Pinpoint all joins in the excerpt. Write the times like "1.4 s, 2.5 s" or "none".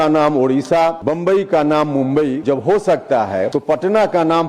1.0 s, 2.4 s, 3.5 s